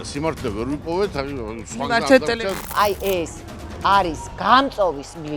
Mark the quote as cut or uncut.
cut